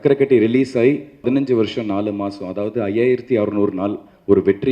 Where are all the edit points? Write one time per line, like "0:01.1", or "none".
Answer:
0:01.2